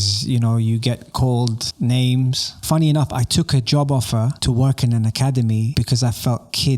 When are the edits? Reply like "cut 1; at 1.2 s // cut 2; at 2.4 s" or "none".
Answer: cut 1; at 1.6 s // cut 2; at 2.5 s // cut 3; at 4.4 s // cut 4; at 5.7 s